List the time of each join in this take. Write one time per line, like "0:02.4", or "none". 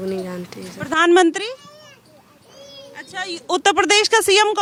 none